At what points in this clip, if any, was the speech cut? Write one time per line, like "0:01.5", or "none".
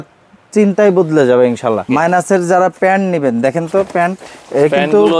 0:01.8

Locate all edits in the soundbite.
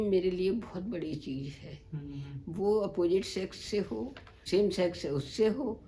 0:04.4

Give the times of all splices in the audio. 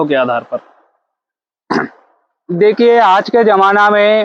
none

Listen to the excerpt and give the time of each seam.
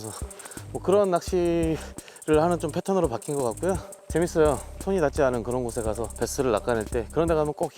0:03.9
0:04.8
0:06.1

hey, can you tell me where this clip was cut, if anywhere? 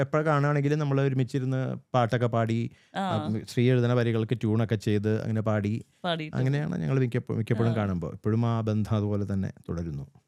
none

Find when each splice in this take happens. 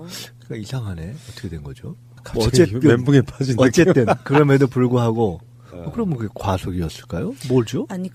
none

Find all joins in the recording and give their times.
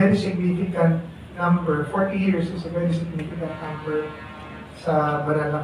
none

